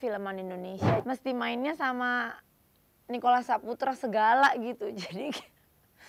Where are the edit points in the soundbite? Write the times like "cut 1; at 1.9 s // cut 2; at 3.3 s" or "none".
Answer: cut 1; at 1.0 s